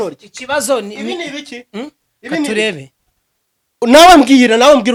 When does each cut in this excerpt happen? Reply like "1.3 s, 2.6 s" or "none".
none